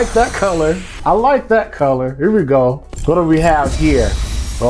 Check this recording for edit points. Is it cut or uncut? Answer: cut